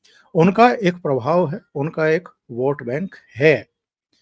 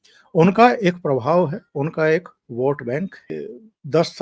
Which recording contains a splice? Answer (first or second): second